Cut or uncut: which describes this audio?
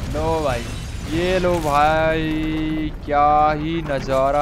uncut